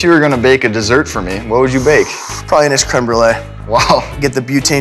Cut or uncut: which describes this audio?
uncut